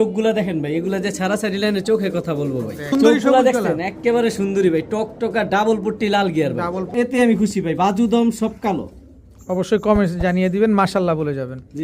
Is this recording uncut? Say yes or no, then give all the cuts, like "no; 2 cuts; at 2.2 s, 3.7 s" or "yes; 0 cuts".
no; 2 cuts; at 2.9 s, 6.9 s